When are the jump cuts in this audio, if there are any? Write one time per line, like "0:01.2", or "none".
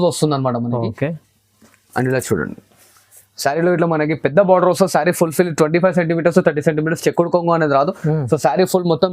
none